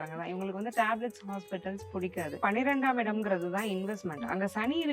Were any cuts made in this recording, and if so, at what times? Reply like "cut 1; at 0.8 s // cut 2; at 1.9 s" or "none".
cut 1; at 2.4 s